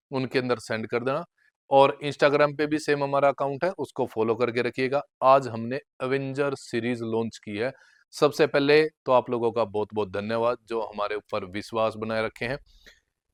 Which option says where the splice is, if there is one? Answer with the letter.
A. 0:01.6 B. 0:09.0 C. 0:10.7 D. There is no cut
D